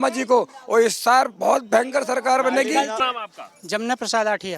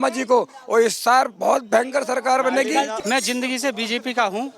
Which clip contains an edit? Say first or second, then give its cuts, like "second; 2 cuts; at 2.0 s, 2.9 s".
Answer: second; 1 cut; at 3.0 s